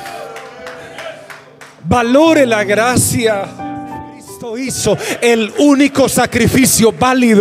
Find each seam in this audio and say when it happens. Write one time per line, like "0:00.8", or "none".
0:04.6

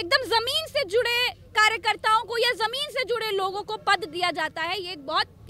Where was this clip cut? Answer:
none

